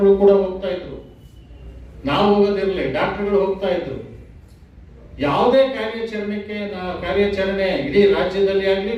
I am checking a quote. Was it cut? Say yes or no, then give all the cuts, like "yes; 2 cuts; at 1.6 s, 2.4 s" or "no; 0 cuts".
no; 0 cuts